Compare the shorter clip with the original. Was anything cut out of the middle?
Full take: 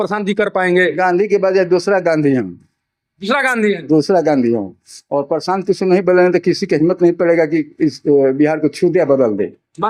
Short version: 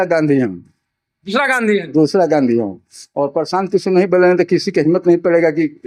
no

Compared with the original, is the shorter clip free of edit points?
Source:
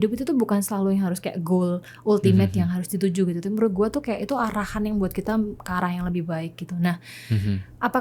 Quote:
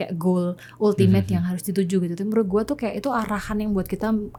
yes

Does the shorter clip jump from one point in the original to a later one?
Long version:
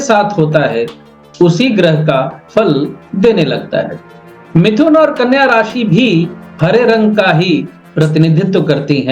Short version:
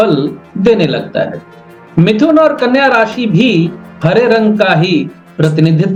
no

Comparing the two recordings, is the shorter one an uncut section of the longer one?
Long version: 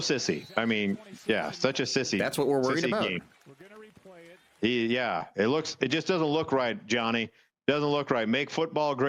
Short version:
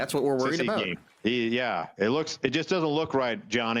no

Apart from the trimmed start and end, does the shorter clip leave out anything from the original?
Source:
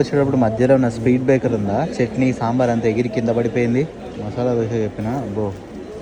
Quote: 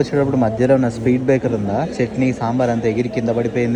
no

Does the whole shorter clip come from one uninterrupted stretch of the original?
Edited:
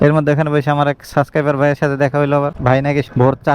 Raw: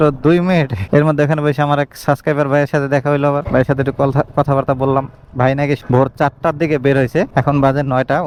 no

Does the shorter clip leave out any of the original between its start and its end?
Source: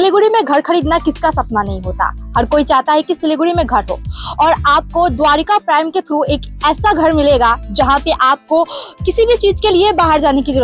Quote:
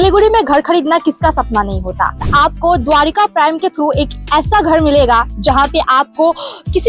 yes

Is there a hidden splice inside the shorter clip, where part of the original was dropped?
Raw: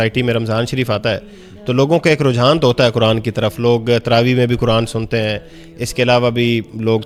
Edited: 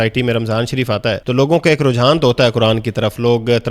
yes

